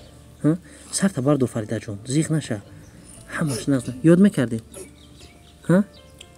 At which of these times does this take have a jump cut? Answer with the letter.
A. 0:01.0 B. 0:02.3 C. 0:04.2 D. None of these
D